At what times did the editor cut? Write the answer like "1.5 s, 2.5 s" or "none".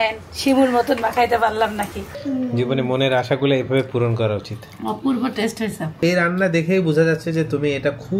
2.1 s, 6.0 s